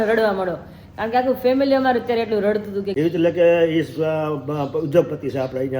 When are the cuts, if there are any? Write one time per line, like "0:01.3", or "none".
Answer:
0:02.8